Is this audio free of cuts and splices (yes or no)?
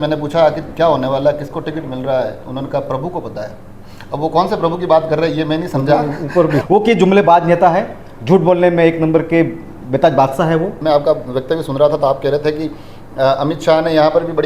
no